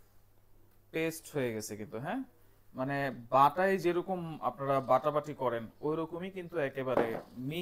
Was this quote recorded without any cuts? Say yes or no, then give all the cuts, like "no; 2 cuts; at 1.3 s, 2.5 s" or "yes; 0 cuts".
yes; 0 cuts